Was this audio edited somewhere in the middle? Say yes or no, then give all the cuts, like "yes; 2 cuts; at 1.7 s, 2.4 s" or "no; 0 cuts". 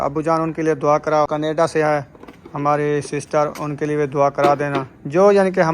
yes; 1 cut; at 1.3 s